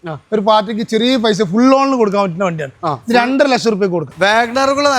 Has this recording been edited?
yes; 1 cut; at 4.1 s

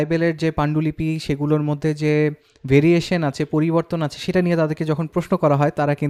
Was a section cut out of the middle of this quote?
no; 0 cuts

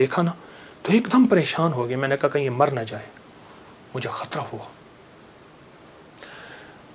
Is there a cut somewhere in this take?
no; 0 cuts

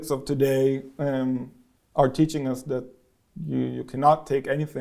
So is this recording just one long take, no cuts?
yes; 0 cuts

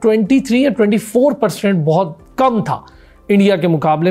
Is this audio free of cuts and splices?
yes; 0 cuts

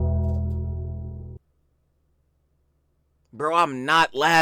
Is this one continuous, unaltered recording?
yes; 0 cuts

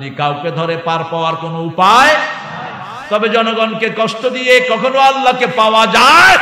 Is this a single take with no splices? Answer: yes; 0 cuts

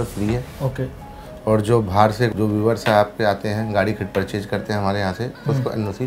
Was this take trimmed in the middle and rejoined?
yes; 1 cut; at 2.3 s

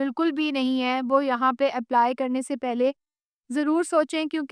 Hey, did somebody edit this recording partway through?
no; 0 cuts

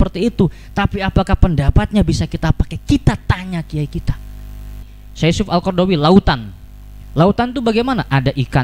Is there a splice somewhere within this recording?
yes; 1 cut; at 4.9 s

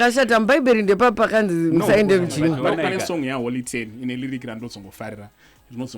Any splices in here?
yes; 1 cut; at 2.6 s

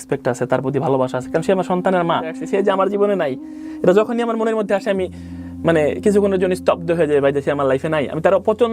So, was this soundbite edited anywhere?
yes; 1 cut; at 2.4 s

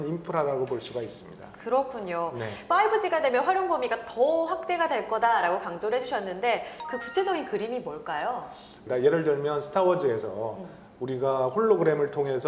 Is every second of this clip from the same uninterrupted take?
yes; 0 cuts

